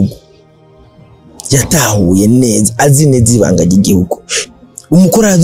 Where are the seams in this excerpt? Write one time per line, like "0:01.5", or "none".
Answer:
0:04.3